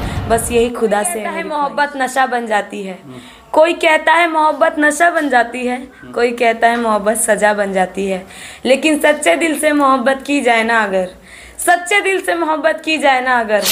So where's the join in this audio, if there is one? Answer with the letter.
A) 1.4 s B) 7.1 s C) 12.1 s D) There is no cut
A